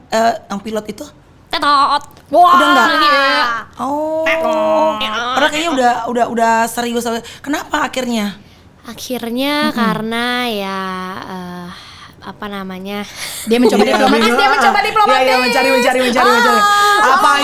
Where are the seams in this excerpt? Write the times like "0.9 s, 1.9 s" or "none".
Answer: none